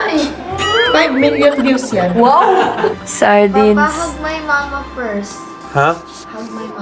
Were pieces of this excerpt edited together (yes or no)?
yes